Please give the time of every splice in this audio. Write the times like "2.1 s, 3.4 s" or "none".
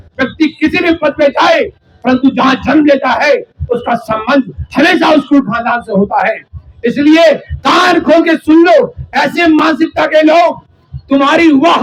none

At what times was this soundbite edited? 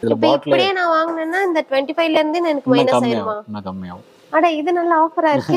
none

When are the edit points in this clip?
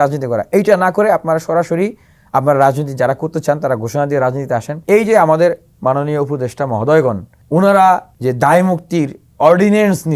4.7 s, 7.3 s, 8.1 s

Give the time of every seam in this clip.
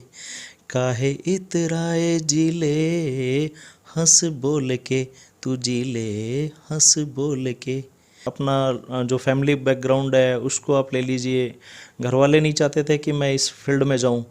8.3 s

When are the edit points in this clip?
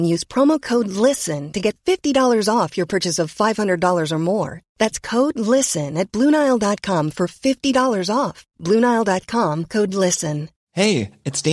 10.6 s

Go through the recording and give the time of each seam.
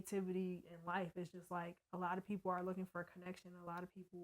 none

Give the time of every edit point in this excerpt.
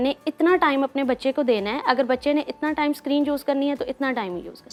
none

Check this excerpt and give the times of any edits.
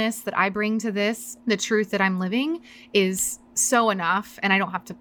1.3 s

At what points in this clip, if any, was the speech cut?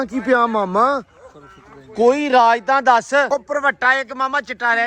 3.3 s

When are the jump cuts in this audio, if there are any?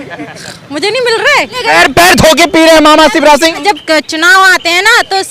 1.6 s, 3.6 s

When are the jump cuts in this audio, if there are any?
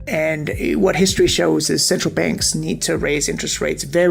none

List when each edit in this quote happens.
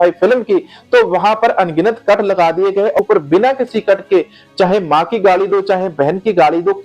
3.0 s

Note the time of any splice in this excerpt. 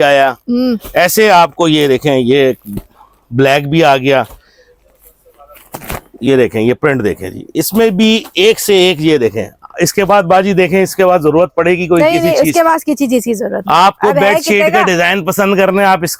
none

